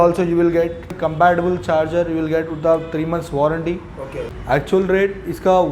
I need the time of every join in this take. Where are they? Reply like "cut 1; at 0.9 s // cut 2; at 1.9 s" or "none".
cut 1; at 0.9 s // cut 2; at 4.4 s